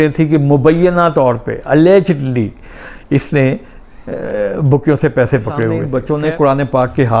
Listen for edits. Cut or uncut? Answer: cut